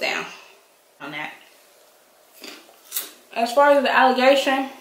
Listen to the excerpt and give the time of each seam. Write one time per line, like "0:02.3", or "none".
0:01.0